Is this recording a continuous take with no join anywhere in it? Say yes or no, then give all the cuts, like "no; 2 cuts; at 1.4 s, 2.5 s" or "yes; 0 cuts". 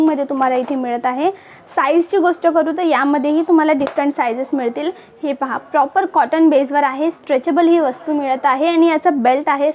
yes; 0 cuts